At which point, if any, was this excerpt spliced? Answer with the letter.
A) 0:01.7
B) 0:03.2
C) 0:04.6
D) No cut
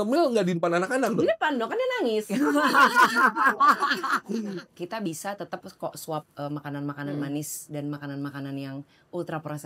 C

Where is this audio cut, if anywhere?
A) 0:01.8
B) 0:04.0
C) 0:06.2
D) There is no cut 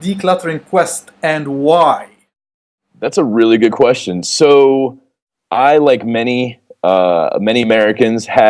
D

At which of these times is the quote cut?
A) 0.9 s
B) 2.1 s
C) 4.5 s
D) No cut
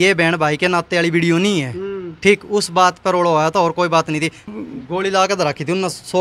C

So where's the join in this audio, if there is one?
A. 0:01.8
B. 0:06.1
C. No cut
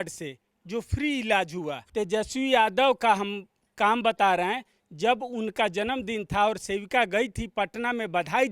A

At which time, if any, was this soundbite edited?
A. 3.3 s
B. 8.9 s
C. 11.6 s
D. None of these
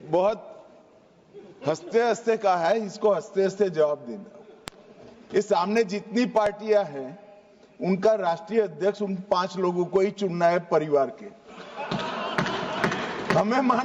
D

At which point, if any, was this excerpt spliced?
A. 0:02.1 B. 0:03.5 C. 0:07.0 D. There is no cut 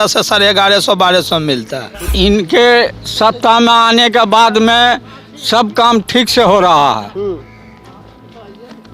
A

